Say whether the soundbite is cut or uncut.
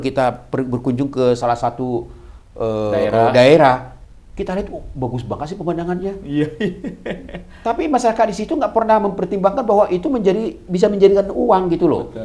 uncut